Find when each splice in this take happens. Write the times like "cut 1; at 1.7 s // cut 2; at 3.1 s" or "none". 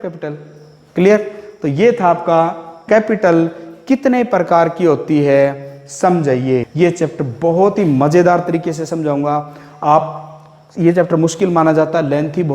cut 1; at 6.6 s